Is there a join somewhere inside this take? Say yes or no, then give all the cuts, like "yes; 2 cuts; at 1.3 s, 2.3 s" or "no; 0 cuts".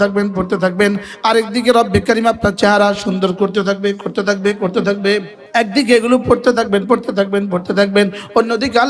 yes; 1 cut; at 5.4 s